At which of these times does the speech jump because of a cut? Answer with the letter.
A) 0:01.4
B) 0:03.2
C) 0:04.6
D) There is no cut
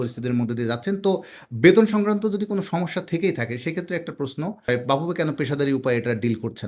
C